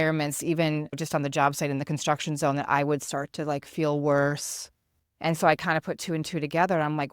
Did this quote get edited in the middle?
yes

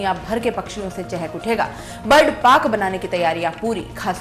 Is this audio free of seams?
yes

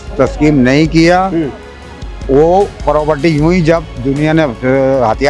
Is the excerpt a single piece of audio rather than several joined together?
yes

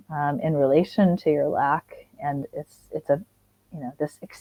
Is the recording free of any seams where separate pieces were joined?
yes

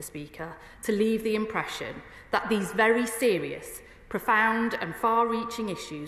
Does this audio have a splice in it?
no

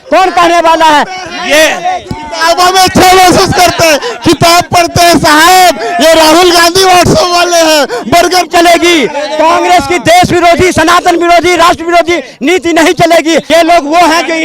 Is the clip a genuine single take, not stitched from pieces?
no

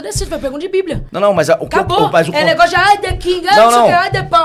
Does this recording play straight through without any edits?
yes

